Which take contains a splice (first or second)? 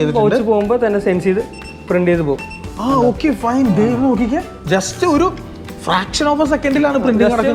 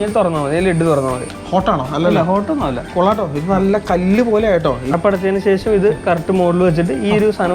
second